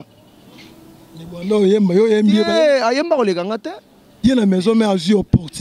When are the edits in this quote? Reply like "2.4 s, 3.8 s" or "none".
4.1 s